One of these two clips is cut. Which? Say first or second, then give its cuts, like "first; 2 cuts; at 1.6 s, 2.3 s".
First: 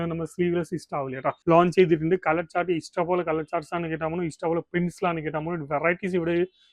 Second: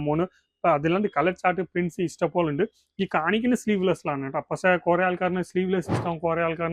first; 1 cut; at 1.4 s